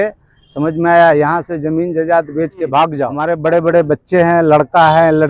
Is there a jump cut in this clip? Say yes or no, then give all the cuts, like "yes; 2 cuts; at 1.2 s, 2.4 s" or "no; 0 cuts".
yes; 1 cut; at 3.1 s